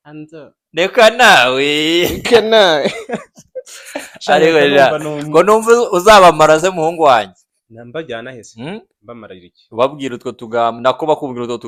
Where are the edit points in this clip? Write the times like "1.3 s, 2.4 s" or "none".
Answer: none